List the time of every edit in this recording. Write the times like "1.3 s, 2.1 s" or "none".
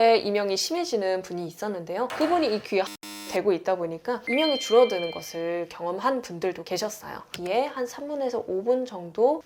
7.2 s